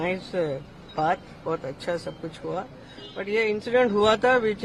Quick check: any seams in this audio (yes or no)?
no